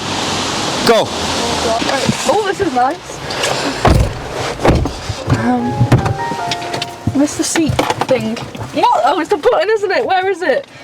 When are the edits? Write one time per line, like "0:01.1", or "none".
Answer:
0:01.8